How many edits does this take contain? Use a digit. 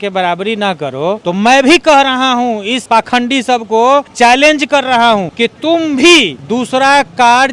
5